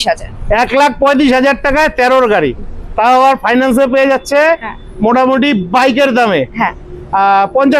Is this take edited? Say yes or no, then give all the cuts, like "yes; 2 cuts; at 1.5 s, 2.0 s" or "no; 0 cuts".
no; 0 cuts